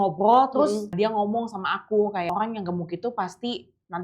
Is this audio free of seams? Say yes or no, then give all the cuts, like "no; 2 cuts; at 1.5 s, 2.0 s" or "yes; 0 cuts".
no; 2 cuts; at 0.9 s, 2.3 s